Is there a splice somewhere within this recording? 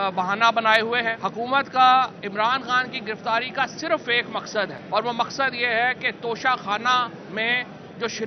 yes; 2 cuts; at 1.2 s, 4.8 s

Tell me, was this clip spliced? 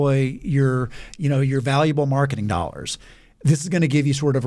no; 0 cuts

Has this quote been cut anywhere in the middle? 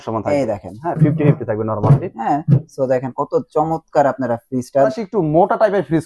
yes; 1 cut; at 5.0 s

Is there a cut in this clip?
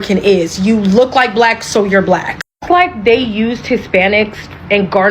no; 0 cuts

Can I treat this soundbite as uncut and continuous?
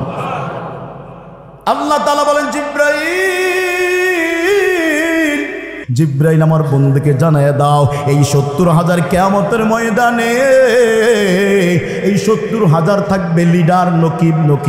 no; 1 cut; at 5.8 s

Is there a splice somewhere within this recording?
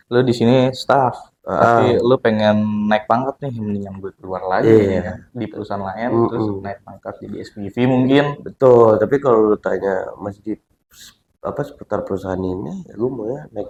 no; 0 cuts

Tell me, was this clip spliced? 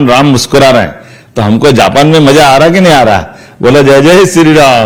no; 0 cuts

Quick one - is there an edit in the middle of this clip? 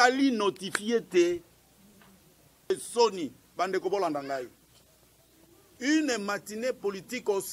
yes; 1 cut; at 2.7 s

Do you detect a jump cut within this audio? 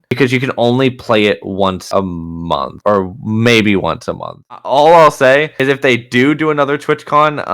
yes; 1 cut; at 4.6 s

